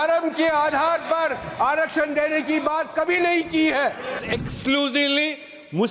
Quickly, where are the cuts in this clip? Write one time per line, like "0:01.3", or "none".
0:04.2